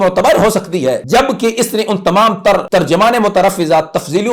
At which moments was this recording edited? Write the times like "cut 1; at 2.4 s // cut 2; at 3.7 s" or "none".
cut 1; at 1.0 s // cut 2; at 2.6 s